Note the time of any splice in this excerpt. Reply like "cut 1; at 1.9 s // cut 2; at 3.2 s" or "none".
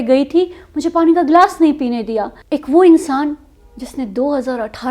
cut 1; at 2.4 s